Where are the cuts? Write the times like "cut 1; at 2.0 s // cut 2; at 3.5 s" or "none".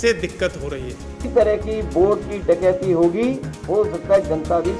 cut 1; at 1.3 s // cut 2; at 3.5 s